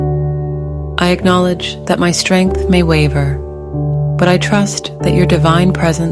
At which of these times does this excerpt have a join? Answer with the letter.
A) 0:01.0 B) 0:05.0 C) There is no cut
A